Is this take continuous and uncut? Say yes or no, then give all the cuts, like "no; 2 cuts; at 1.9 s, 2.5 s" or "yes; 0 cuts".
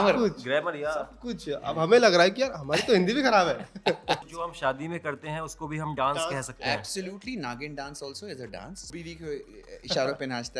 no; 2 cuts; at 4.3 s, 8.9 s